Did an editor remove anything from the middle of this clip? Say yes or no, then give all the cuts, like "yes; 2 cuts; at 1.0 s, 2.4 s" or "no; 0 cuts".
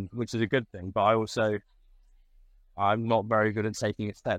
no; 0 cuts